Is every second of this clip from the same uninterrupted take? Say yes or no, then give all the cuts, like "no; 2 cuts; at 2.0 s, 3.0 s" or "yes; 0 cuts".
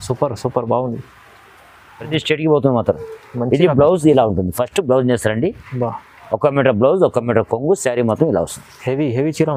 no; 1 cut; at 2.1 s